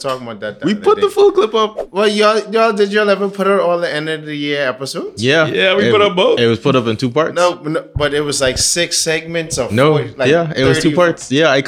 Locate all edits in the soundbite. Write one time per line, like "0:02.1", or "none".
0:01.8